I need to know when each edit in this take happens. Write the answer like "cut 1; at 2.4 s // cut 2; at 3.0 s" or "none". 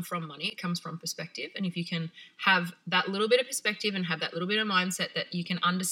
none